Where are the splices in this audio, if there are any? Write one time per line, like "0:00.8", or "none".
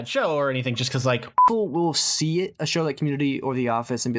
0:01.5

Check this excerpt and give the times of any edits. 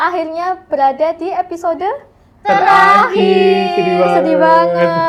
none

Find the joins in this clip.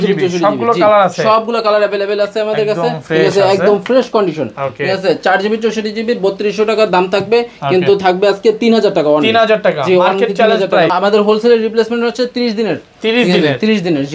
0:10.9

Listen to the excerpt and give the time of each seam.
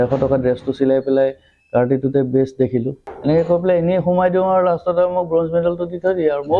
0:03.0

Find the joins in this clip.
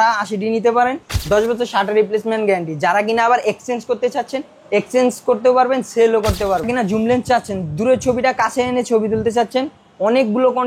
0:01.1
0:06.7

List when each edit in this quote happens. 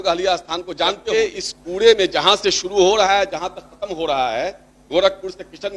0:01.0

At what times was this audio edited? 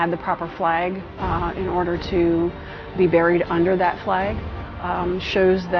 none

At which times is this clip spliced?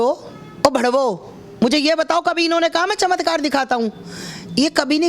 none

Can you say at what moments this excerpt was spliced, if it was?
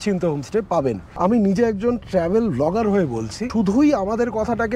0:01.1
0:03.4

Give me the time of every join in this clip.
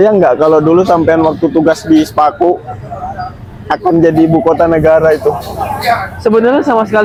none

